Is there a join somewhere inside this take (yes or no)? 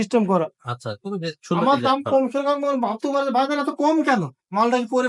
no